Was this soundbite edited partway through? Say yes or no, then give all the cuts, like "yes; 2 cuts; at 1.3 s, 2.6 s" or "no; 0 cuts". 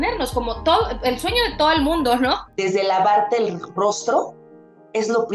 yes; 1 cut; at 2.4 s